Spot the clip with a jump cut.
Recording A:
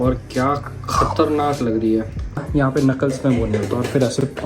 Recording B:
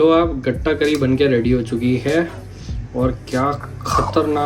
A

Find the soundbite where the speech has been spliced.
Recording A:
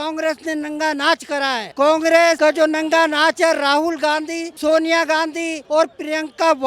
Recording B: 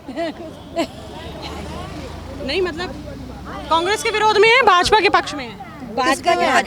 A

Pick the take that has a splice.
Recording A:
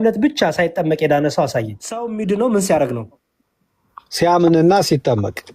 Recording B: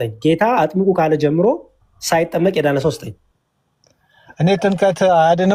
A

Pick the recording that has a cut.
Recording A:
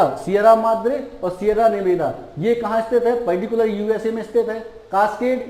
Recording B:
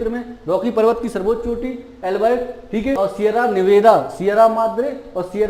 B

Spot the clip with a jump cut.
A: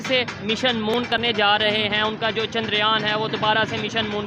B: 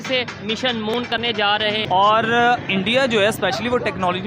B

